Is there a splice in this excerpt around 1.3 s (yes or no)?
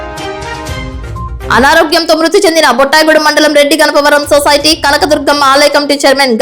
yes